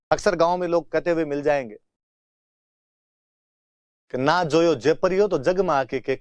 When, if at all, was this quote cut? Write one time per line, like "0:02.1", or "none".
none